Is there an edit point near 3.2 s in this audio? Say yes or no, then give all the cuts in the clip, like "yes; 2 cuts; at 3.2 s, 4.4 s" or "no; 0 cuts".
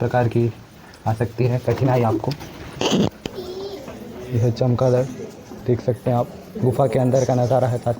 yes; 1 cut; at 3.2 s